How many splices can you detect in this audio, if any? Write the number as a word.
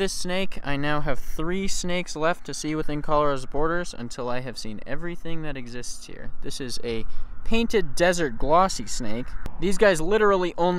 zero